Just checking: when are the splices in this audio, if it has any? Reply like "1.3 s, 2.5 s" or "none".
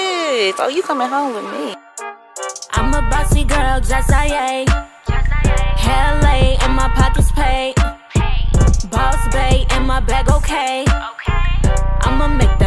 1.8 s